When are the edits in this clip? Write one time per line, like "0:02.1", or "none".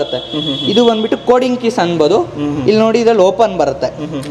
none